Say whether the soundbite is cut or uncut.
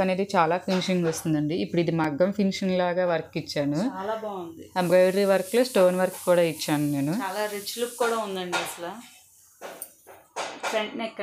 uncut